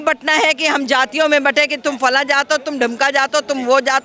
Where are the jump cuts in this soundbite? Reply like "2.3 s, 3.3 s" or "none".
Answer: none